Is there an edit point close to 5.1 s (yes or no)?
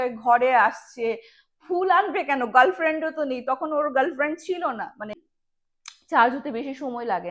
yes